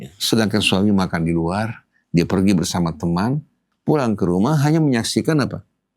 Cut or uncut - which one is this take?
cut